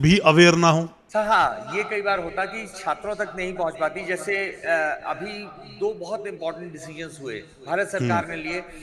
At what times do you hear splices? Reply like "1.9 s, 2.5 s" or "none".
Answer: 1.0 s